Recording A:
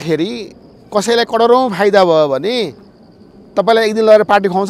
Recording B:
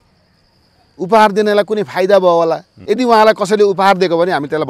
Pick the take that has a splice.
B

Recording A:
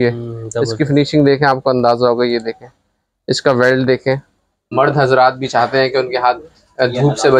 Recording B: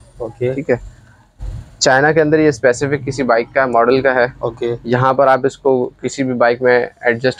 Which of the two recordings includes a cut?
A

